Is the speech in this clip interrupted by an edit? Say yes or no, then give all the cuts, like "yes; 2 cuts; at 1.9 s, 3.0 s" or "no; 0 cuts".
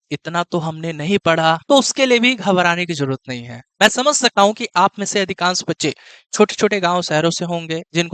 no; 0 cuts